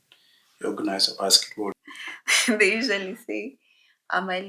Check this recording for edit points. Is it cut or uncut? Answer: cut